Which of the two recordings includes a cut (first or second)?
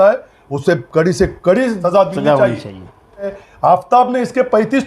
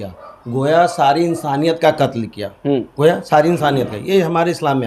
first